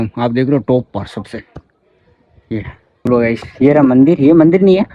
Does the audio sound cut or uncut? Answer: cut